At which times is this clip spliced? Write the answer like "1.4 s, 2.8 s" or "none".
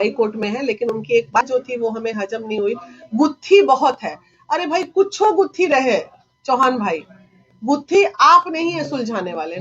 1.4 s